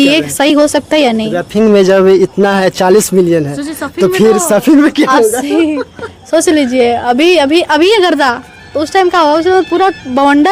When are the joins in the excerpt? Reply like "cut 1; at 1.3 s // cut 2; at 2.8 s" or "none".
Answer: none